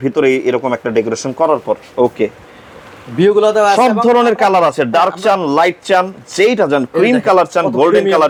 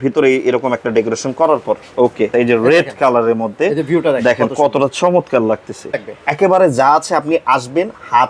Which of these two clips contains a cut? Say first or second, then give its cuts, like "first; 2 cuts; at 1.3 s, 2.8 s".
second; 2 cuts; at 2.3 s, 6.0 s